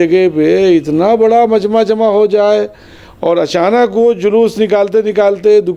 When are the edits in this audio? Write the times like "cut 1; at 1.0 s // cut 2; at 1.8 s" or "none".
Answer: none